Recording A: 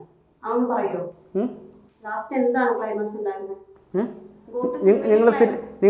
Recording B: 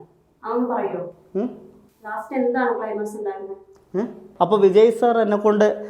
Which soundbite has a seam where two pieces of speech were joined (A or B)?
B